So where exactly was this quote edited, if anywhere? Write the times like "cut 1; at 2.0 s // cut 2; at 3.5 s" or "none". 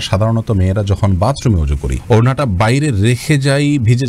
none